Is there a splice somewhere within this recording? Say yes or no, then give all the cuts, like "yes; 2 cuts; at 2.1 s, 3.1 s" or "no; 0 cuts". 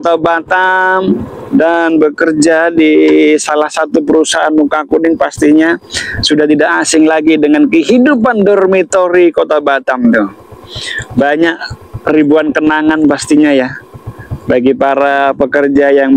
no; 0 cuts